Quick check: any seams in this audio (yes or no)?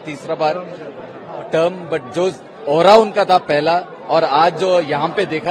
no